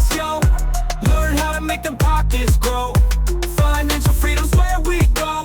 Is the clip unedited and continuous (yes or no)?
yes